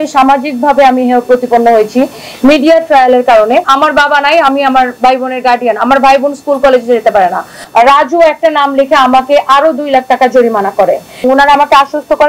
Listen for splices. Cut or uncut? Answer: cut